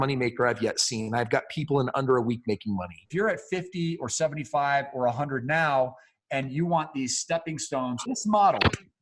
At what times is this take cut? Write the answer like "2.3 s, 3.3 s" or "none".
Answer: 3.1 s, 8.0 s